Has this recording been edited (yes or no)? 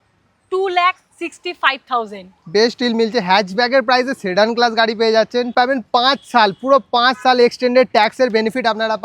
yes